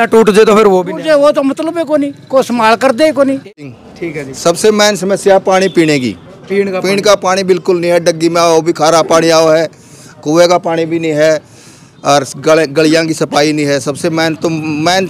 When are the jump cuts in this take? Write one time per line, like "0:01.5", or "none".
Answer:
0:03.5